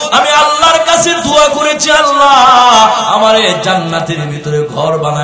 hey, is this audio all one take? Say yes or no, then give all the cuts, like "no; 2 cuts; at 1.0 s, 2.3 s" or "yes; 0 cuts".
yes; 0 cuts